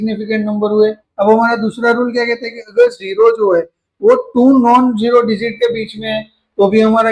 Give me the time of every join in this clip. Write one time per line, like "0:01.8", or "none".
none